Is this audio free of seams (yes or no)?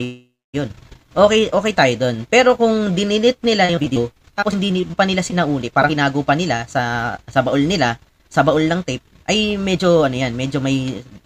yes